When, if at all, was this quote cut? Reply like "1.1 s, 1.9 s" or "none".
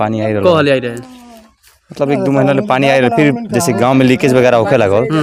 none